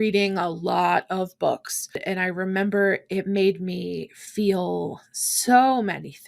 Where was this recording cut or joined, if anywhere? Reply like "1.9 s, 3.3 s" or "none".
2.0 s